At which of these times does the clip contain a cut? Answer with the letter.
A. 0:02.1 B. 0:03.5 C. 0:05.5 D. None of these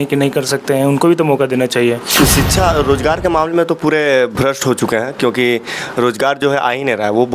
A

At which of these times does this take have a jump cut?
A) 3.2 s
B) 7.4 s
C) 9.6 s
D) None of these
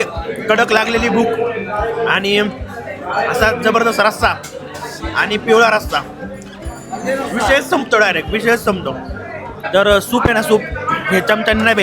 C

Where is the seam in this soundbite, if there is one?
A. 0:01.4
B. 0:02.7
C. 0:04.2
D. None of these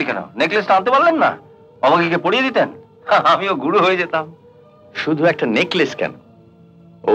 D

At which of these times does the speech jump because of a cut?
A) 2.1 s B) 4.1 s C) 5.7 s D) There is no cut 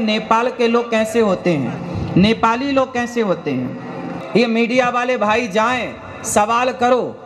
B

